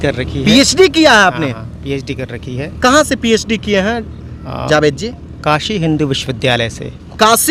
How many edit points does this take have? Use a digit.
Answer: 0